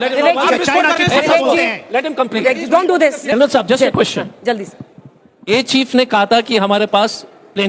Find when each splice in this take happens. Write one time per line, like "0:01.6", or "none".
0:03.3